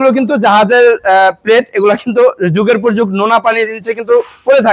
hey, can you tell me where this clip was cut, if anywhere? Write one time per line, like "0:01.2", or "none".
none

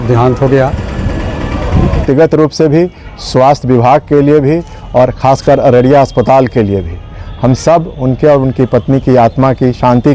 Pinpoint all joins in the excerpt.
0:02.0

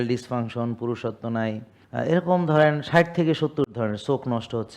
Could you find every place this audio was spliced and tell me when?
0:01.7

